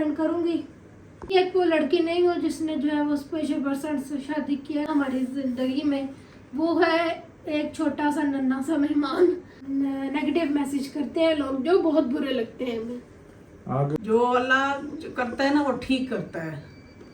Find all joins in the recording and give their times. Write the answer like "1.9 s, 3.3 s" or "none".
1.3 s, 4.9 s, 9.6 s, 14.0 s